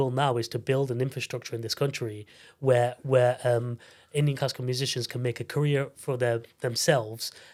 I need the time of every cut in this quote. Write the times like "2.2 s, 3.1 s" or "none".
none